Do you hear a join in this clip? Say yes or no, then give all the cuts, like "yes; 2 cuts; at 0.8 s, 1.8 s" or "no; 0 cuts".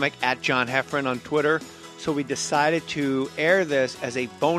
yes; 1 cut; at 3.3 s